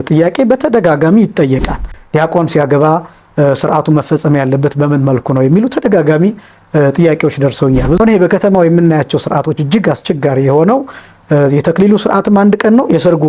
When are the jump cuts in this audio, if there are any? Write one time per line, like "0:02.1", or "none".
0:01.9
0:08.0